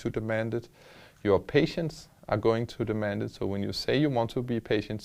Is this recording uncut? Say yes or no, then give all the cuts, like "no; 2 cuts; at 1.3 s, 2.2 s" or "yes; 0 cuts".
yes; 0 cuts